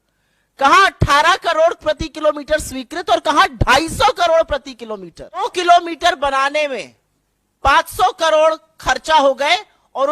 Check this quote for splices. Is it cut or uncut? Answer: cut